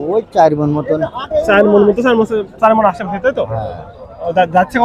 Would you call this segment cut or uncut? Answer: uncut